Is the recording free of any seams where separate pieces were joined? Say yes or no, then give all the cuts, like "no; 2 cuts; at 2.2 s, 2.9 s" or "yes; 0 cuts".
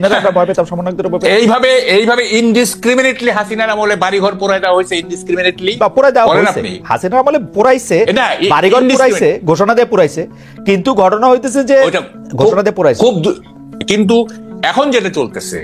no; 1 cut; at 13.8 s